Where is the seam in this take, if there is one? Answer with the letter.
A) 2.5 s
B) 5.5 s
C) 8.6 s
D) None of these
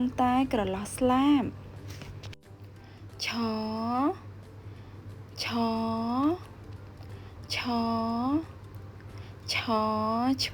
A